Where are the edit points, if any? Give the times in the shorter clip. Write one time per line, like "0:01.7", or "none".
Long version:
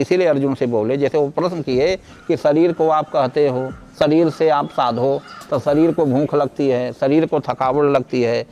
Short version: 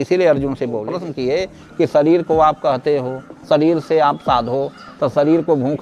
0:00.9